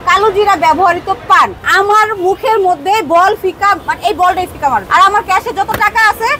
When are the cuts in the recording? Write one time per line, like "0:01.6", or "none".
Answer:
none